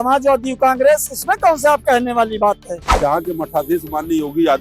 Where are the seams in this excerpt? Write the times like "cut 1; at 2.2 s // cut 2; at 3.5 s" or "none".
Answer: cut 1; at 2.8 s

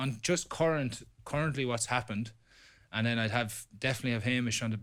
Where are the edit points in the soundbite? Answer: none

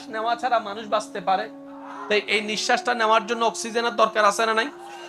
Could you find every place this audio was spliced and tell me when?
cut 1; at 2.0 s

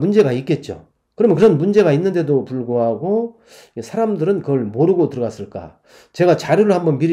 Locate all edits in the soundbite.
none

